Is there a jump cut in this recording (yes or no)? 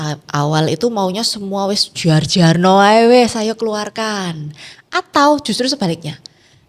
no